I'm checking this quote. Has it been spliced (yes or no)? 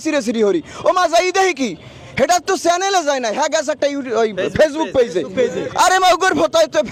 no